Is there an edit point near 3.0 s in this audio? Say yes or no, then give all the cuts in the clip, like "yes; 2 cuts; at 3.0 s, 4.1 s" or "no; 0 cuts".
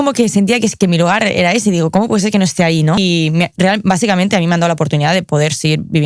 yes; 1 cut; at 3.0 s